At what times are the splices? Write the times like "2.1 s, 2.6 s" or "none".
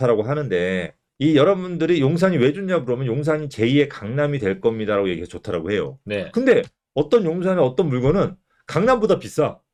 none